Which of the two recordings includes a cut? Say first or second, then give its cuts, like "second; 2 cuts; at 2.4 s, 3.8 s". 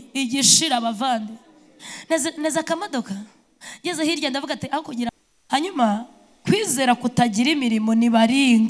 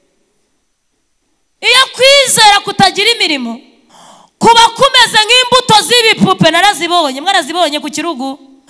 first; 1 cut; at 5.3 s